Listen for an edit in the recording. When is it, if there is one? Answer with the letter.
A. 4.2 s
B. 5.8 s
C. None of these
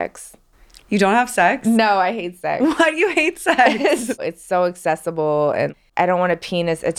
A